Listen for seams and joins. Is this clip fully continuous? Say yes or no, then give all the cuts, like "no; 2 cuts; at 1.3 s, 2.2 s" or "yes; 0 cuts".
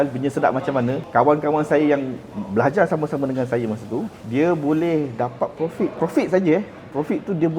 no; 3 cuts; at 1.0 s, 4.2 s, 5.9 s